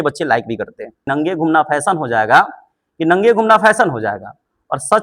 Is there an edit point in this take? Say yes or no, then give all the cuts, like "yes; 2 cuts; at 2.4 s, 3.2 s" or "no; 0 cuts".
yes; 1 cut; at 1.1 s